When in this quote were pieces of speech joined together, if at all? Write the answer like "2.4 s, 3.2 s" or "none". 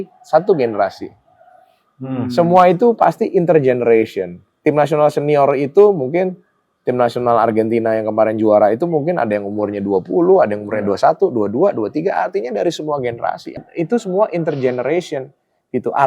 13.5 s